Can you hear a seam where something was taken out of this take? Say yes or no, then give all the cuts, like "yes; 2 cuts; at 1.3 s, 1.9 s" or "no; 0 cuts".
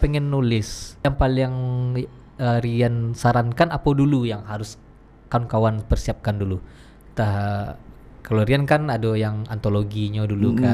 yes; 1 cut; at 1.1 s